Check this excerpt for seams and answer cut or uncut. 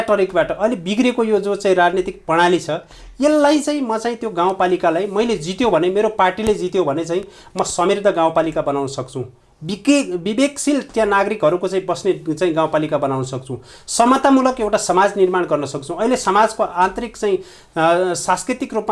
uncut